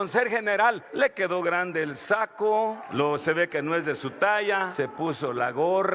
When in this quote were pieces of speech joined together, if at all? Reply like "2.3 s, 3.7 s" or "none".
0.9 s, 2.8 s, 4.7 s